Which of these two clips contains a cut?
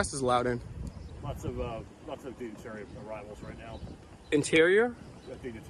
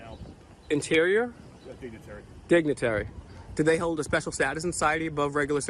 first; 1 cut; at 1.1 s

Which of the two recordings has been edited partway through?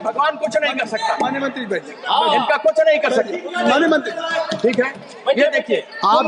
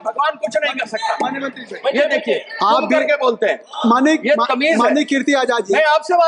second; 1 cut; at 1.6 s

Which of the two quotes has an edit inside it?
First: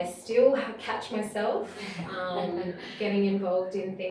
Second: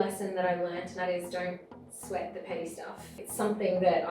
second; 2 cuts; at 1.0 s, 3.2 s

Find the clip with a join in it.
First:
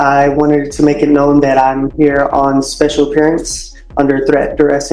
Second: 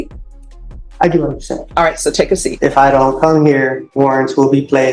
second; 2 cuts; at 2.5 s, 3.8 s

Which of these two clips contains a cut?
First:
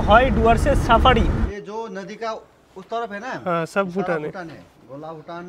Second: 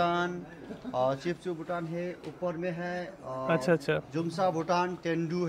first; 1 cut; at 1.5 s

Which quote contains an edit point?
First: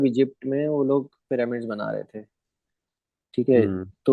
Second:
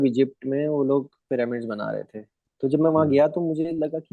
second; 1 cut; at 2.4 s

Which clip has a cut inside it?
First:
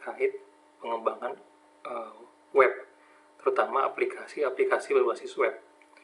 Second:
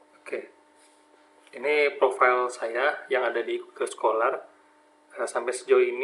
first; 1 cut; at 4.5 s

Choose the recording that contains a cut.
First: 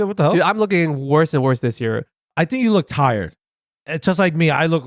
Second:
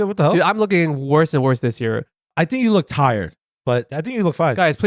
second; 1 cut; at 3.5 s

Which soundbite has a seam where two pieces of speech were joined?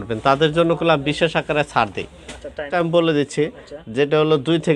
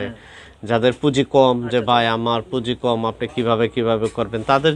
first; 1 cut; at 2.7 s

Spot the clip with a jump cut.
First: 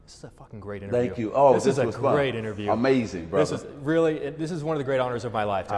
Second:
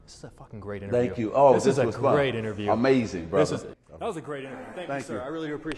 second; 1 cut; at 3.8 s

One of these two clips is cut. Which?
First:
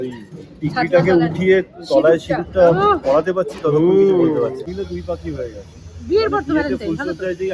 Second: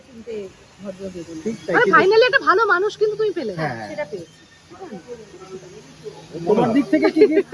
first; 1 cut; at 4.6 s

